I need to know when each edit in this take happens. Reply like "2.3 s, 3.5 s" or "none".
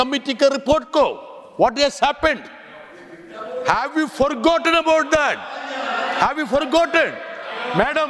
none